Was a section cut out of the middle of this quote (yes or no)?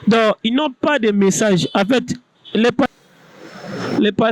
yes